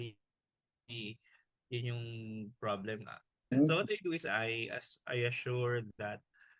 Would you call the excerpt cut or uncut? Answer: cut